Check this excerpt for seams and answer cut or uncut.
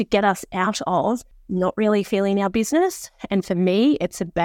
cut